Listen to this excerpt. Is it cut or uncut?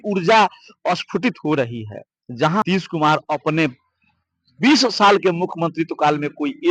cut